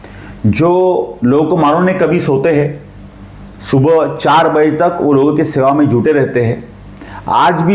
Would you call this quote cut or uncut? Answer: uncut